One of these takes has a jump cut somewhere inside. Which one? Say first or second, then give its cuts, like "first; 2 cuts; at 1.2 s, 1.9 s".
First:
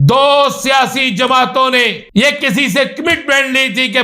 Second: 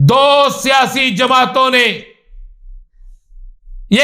first; 1 cut; at 2.0 s